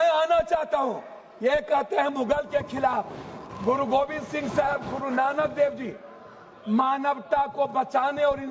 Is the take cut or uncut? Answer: uncut